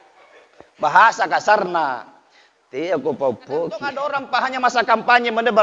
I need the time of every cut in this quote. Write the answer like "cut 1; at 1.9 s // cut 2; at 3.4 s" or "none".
cut 1; at 4.2 s